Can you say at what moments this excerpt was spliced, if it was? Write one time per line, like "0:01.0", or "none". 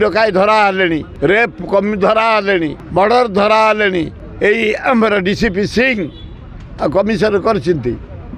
0:01.1
0:02.8
0:04.2